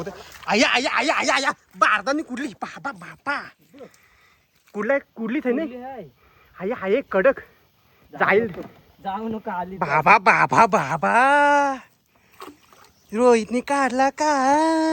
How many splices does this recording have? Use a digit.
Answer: 0